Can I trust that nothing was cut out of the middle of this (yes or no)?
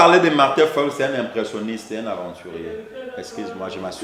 yes